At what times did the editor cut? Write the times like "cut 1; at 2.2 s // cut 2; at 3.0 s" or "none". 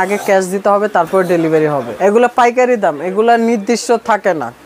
cut 1; at 1.9 s